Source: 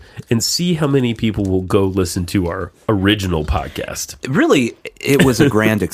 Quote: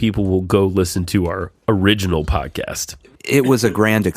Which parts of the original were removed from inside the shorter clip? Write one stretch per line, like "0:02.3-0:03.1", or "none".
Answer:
0:04.2-0:04.8